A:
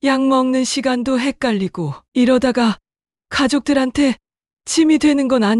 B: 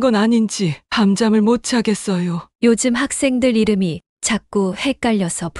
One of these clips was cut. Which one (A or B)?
B